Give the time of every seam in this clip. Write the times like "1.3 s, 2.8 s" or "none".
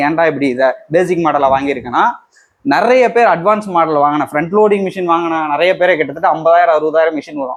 none